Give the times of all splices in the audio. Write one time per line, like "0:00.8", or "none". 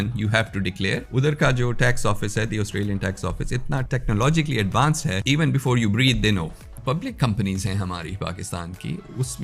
0:01.1
0:03.9
0:05.2
0:06.7